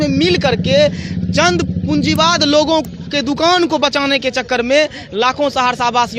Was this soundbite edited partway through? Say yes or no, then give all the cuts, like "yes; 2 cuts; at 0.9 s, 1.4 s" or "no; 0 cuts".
no; 0 cuts